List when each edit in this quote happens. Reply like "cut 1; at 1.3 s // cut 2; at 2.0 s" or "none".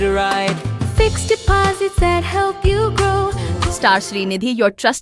cut 1; at 3.5 s